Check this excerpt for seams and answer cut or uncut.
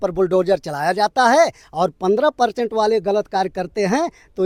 uncut